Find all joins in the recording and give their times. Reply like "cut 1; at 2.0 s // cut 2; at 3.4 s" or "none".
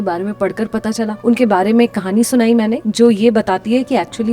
cut 1; at 1.2 s // cut 2; at 2.8 s